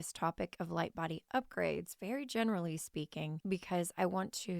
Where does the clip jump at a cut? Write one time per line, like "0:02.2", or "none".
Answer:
0:03.4